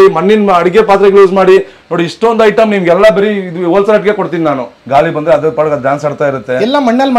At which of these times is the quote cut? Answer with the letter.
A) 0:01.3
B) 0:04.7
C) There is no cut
B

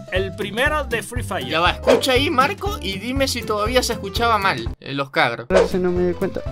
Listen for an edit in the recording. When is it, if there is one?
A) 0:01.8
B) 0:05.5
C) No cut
C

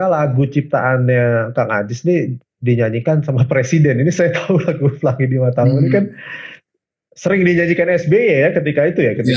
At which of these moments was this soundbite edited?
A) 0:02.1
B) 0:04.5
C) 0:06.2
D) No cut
D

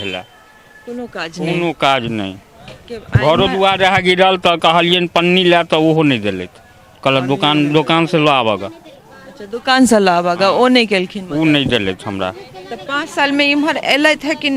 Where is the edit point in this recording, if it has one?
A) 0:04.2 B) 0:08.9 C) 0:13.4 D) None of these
D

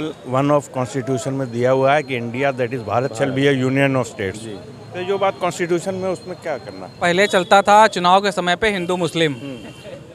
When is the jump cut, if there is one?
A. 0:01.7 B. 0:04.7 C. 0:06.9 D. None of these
C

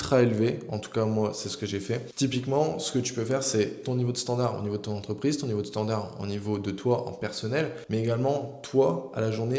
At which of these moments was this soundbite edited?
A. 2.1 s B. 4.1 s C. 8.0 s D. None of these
D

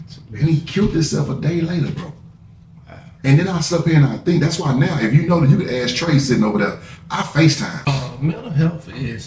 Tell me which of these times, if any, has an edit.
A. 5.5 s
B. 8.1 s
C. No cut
B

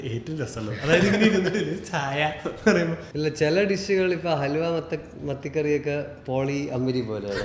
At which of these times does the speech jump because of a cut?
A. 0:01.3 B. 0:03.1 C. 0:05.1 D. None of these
B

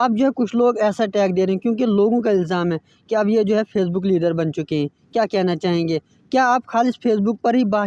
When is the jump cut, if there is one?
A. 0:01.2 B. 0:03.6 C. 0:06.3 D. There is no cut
D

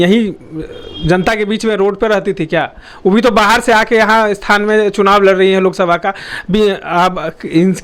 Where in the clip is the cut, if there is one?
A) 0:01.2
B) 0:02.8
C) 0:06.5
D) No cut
D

